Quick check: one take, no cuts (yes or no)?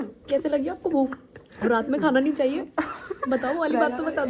yes